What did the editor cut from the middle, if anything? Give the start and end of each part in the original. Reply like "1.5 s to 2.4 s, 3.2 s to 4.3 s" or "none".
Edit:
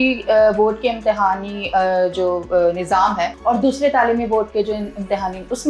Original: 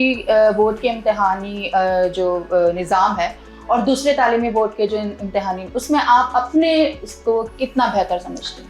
3.3 s to 3.6 s